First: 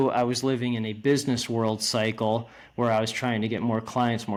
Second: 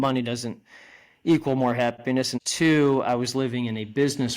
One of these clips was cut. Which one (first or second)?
second